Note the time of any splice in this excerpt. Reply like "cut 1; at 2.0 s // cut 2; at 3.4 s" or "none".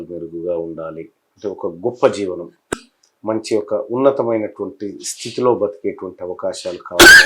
cut 1; at 2.7 s